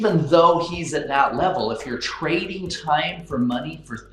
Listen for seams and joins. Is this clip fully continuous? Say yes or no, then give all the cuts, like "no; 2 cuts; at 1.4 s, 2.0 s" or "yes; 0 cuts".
yes; 0 cuts